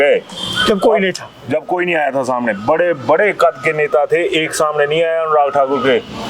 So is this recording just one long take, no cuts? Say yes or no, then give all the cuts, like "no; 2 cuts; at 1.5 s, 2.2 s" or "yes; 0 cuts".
yes; 0 cuts